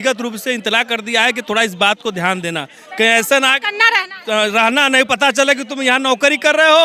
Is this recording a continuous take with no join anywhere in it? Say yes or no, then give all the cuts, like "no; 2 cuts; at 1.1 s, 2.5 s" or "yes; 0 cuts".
yes; 0 cuts